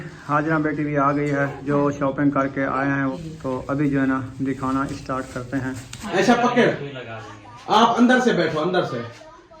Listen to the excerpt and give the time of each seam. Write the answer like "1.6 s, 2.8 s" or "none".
1.6 s, 3.2 s, 6.1 s